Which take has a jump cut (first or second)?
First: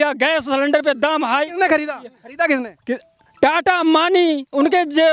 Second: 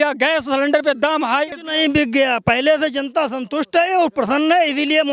second